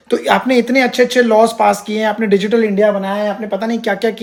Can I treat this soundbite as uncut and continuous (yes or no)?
yes